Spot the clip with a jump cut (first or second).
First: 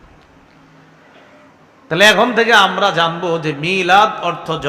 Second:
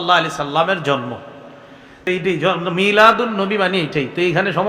second